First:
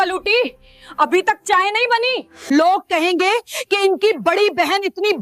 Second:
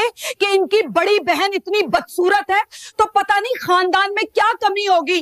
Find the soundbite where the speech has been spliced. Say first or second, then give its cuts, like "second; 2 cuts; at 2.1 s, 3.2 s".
first; 1 cut; at 2.3 s